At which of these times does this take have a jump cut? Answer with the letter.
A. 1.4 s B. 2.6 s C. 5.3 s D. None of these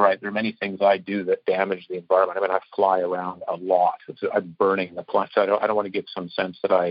C